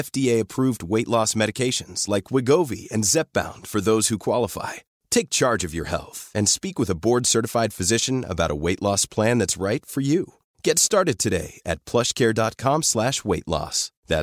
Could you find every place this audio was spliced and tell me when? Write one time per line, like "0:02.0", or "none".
none